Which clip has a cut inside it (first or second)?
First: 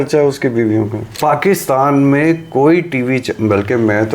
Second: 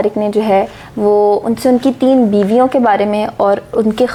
first